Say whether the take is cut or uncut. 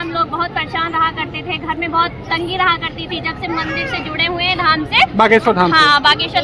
uncut